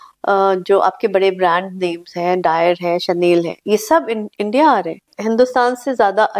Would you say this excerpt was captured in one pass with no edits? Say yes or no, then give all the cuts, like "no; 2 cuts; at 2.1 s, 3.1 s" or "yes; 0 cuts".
no; 1 cut; at 5.1 s